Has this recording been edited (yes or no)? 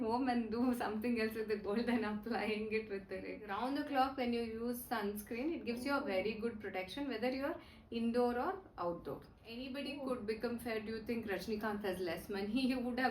yes